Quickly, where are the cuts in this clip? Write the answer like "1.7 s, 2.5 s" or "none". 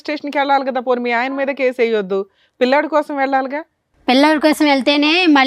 none